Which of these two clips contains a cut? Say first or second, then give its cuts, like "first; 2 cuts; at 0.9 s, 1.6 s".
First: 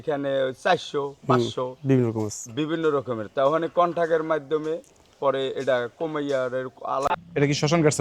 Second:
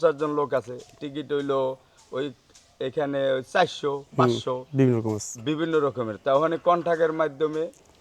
first; 1 cut; at 7.1 s